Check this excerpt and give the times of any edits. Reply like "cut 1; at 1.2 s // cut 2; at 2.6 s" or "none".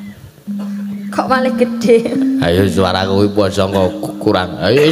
none